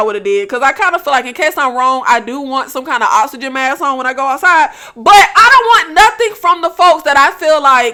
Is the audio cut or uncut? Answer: uncut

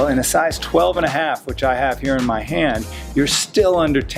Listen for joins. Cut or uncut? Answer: uncut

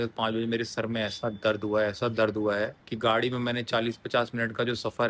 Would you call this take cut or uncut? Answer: uncut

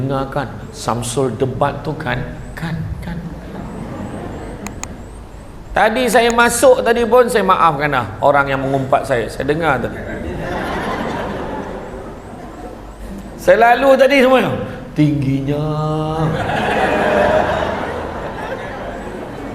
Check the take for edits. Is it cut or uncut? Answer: uncut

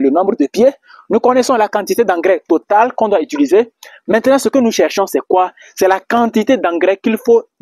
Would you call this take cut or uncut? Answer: uncut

